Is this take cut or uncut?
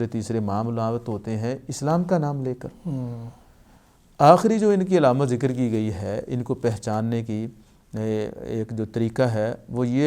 uncut